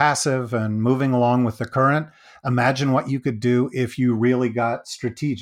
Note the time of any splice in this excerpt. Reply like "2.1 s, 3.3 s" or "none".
none